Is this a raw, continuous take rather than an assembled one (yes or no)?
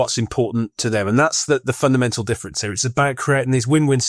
yes